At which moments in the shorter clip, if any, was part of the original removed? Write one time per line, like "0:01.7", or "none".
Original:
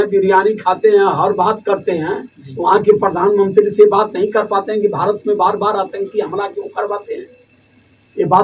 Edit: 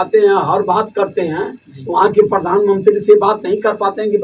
none